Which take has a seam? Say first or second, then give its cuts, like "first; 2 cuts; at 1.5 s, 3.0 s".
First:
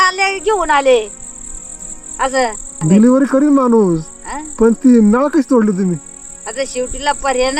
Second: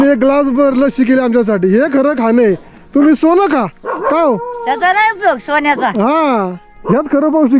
first; 1 cut; at 2.7 s